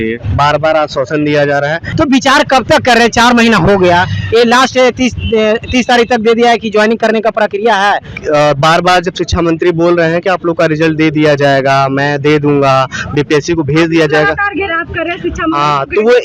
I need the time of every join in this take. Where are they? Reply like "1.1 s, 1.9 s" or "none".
1.8 s, 8.1 s